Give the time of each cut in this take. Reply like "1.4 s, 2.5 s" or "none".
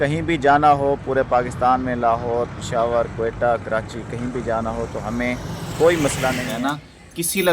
6.5 s